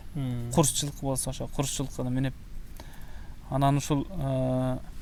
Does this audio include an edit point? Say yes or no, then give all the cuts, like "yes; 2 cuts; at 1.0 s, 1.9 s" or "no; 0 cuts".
no; 0 cuts